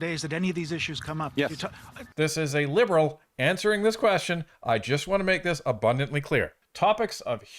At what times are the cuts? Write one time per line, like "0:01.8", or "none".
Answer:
0:02.0
0:06.6